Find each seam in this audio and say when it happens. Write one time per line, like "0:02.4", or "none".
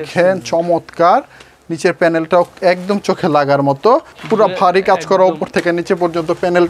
0:04.1